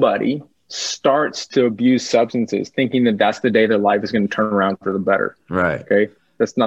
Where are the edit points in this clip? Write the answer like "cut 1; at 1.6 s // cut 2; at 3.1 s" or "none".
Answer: none